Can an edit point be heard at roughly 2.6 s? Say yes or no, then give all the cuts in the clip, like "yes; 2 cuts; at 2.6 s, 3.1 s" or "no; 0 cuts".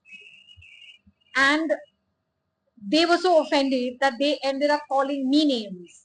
no; 0 cuts